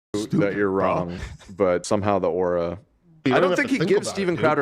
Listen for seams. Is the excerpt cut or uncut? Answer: cut